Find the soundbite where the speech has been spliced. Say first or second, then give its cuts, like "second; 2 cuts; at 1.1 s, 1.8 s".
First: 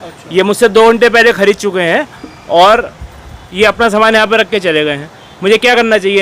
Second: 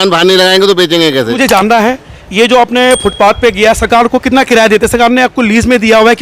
second; 1 cut; at 1.4 s